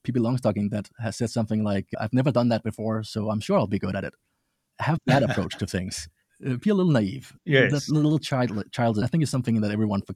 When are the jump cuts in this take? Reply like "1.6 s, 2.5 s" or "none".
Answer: 0.9 s, 1.9 s, 4.7 s, 9.1 s